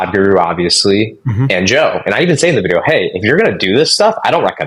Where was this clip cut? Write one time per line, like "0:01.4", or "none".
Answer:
none